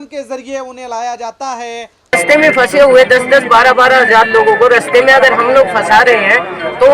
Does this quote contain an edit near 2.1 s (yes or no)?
yes